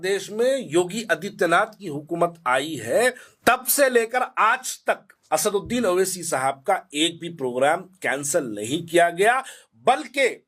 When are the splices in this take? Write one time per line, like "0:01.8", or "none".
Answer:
0:03.3
0:05.1